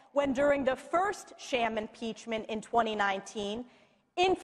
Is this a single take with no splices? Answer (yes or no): yes